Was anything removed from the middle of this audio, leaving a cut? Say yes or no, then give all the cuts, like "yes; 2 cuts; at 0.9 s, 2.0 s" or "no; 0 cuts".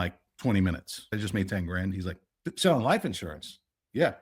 yes; 1 cut; at 1.1 s